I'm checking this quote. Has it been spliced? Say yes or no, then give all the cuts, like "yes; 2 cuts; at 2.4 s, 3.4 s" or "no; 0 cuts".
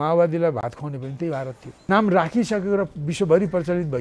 yes; 1 cut; at 1.7 s